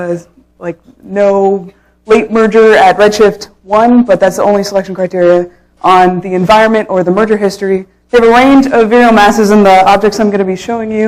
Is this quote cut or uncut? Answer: uncut